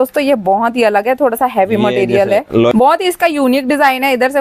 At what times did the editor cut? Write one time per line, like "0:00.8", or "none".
0:02.7

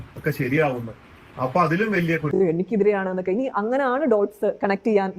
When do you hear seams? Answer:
0:02.4

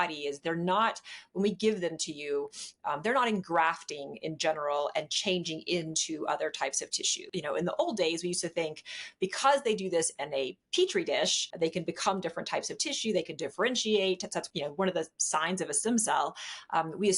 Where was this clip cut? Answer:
0:07.3
0:11.4
0:14.5

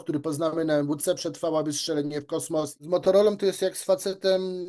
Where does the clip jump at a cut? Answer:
0:02.8

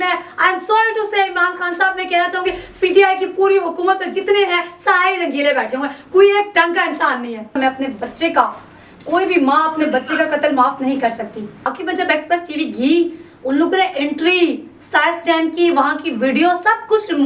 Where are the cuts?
0:07.5
0:11.7

